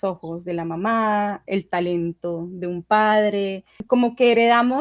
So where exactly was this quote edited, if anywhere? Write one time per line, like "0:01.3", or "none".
0:03.7